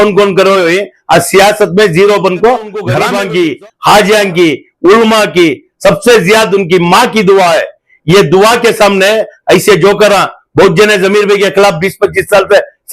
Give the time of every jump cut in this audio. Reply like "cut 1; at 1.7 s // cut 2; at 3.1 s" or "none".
cut 1; at 3.0 s